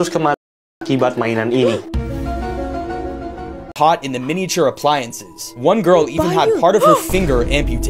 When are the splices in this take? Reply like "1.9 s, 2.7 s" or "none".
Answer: 3.7 s